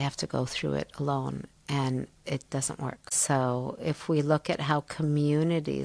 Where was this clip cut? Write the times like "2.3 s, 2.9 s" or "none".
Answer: none